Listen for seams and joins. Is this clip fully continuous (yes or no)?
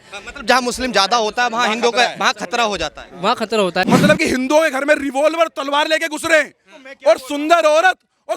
no